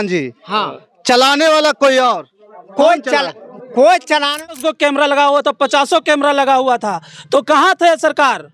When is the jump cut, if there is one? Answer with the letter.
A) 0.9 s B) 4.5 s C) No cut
B